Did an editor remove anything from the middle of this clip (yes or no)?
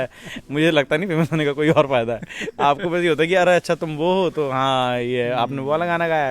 no